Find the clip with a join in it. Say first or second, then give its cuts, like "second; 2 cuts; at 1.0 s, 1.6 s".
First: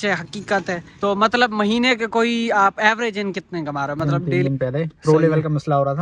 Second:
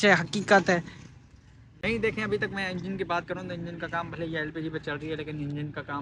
first; 2 cuts; at 0.9 s, 4.4 s